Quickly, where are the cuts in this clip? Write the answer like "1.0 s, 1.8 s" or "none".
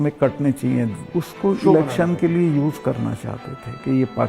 1.0 s